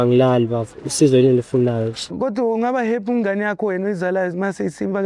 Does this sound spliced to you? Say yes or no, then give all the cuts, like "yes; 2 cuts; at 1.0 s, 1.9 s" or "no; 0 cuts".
yes; 1 cut; at 2.1 s